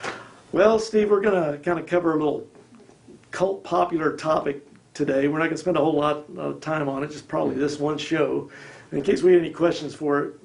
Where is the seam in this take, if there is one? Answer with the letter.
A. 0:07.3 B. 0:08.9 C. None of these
B